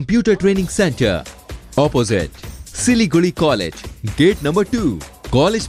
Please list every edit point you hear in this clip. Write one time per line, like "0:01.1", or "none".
none